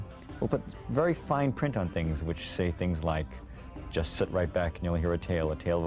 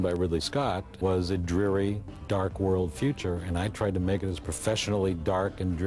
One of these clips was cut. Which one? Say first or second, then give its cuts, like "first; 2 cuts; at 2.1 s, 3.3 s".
second; 2 cuts; at 0.9 s, 2.1 s